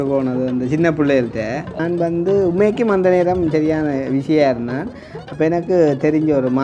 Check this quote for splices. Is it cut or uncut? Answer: cut